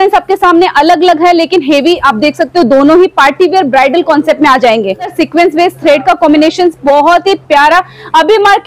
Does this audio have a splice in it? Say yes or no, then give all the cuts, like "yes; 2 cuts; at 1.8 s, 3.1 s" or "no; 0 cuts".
yes; 1 cut; at 5.1 s